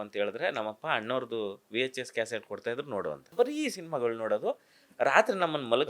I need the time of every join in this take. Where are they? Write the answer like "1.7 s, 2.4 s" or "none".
3.3 s